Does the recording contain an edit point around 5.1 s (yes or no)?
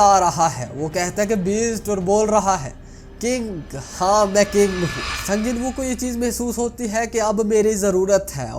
yes